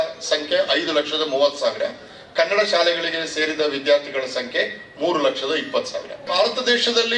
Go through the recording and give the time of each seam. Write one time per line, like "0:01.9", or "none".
0:06.3